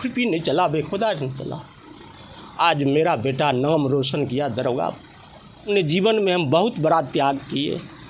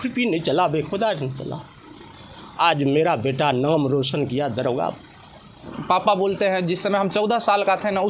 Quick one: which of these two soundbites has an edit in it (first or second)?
second